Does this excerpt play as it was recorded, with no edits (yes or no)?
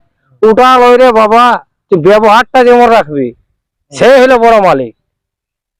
yes